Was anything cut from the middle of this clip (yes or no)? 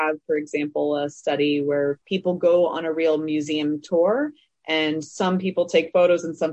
yes